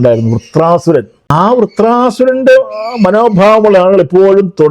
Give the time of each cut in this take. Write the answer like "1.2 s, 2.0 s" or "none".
1.2 s